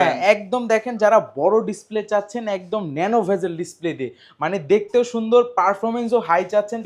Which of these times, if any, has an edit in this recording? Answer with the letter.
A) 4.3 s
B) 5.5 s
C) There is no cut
C